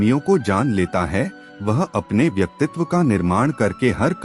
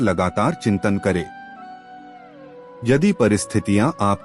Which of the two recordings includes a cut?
second; 2 cuts; at 1.4 s, 2.8 s

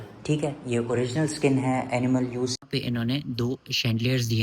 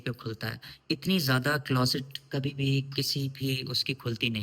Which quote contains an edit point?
first; 1 cut; at 2.6 s

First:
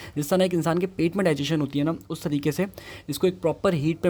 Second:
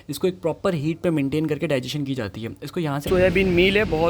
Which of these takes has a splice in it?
second; 1 cut; at 3.0 s

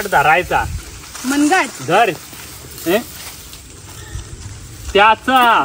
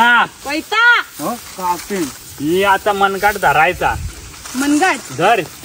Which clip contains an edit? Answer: second; 1 cut; at 2.2 s

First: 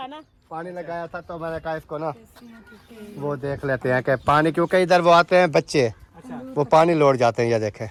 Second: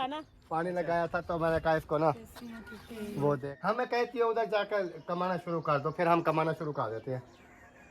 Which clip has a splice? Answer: second; 1 cut; at 3.4 s

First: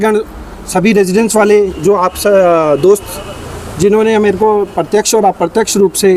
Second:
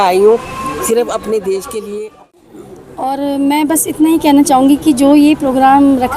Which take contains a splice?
second; 1 cut; at 2.4 s

